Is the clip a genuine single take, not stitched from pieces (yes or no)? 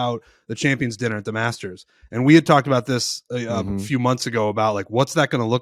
yes